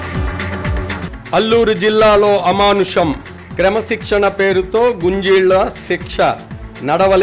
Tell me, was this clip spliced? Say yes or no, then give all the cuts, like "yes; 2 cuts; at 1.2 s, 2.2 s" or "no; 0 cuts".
yes; 1 cut; at 1.0 s